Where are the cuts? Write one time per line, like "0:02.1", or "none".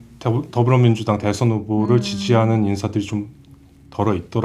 none